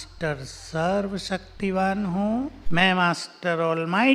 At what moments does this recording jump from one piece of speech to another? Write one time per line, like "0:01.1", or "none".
0:02.6